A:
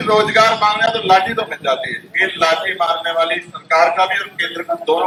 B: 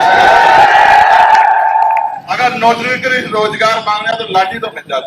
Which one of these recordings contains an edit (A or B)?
B